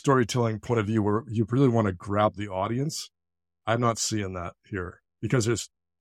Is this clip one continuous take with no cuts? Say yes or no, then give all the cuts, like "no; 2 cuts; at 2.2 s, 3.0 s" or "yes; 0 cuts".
yes; 0 cuts